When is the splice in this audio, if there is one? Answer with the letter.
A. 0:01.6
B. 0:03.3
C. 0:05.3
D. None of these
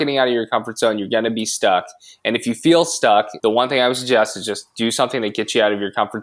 B